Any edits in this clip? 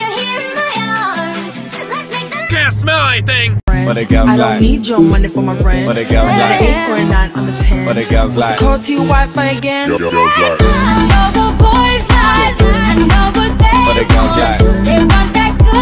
no; 0 cuts

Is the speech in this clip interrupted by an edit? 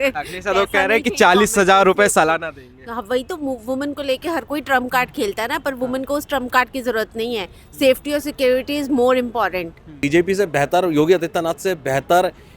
yes; 1 cut; at 10.0 s

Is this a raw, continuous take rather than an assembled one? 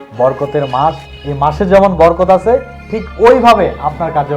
yes; 0 cuts

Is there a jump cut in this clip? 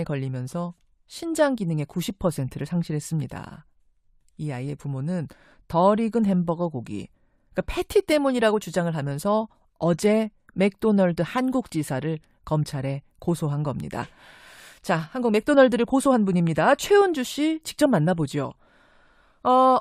yes; 1 cut; at 17.6 s

